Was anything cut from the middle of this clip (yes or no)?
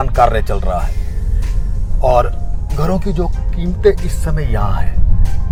no